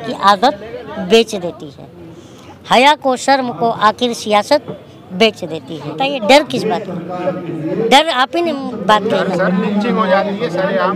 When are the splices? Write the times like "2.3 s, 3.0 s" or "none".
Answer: 5.9 s

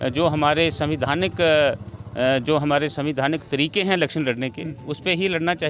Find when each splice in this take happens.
none

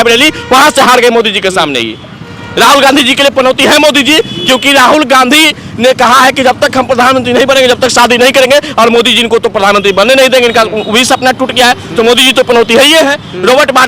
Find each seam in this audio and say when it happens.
none

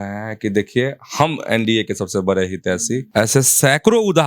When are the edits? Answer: 3.1 s

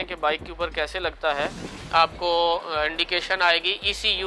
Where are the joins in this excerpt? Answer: 1.7 s

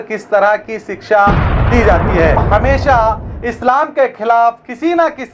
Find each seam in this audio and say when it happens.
2.4 s

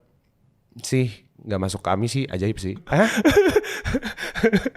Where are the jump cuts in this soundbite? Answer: 2.8 s

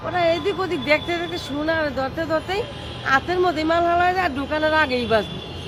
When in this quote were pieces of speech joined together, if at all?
none

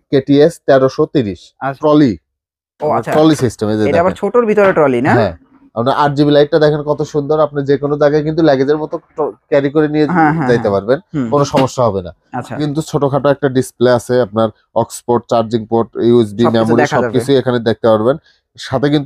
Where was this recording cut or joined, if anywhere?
1.7 s, 12.7 s

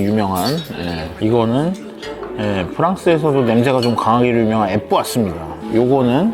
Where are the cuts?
1.1 s

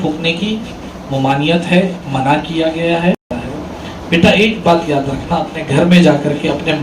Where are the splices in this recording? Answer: 3.2 s

